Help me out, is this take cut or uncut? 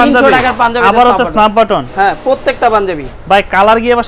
uncut